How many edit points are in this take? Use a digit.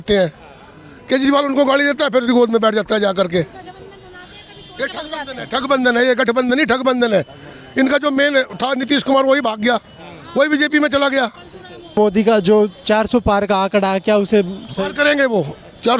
1